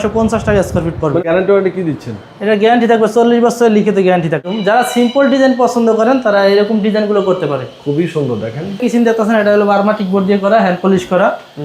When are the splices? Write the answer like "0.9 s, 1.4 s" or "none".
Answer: 1.2 s, 4.4 s, 8.8 s